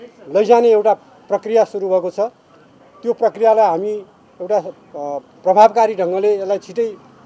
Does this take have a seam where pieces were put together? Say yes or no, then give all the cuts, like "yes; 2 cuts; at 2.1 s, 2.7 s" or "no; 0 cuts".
no; 0 cuts